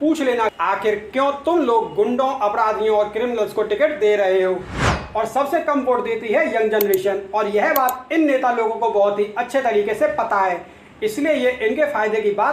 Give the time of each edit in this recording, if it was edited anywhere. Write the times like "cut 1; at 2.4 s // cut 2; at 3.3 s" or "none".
cut 1; at 4.9 s